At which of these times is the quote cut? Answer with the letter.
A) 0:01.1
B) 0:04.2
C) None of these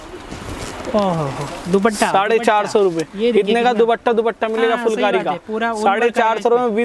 C